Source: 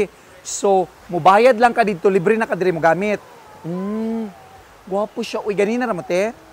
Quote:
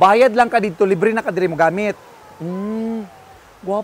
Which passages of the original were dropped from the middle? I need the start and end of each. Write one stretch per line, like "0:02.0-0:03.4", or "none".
none